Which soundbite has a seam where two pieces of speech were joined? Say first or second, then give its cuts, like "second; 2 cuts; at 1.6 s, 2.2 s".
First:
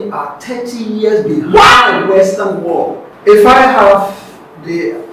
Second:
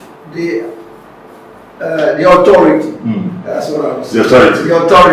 first; 1 cut; at 3.0 s